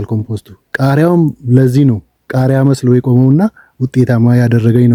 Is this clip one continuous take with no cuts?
yes; 0 cuts

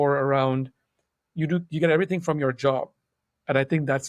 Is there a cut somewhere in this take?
no; 0 cuts

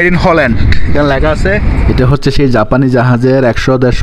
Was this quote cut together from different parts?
yes; 1 cut; at 1.8 s

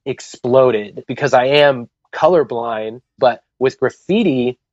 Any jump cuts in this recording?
yes; 2 cuts; at 1.0 s, 3.1 s

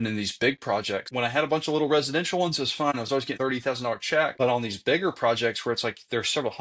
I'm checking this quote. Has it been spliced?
yes; 3 cuts; at 1.1 s, 3.2 s, 4.3 s

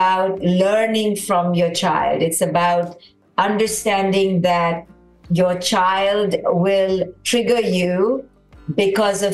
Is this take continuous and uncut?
yes; 0 cuts

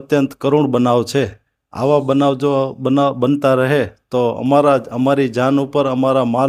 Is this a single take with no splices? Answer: yes; 0 cuts

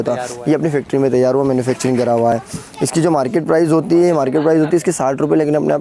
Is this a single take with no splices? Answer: yes; 0 cuts

